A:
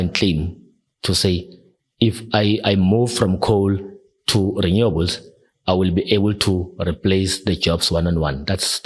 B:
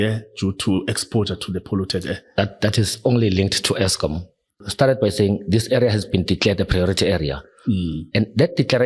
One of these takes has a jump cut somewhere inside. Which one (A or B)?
B